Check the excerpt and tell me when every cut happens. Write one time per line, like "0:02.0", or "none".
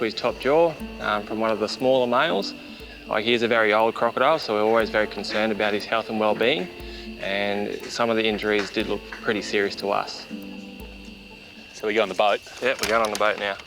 none